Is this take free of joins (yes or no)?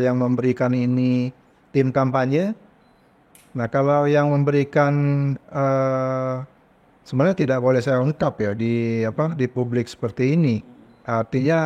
yes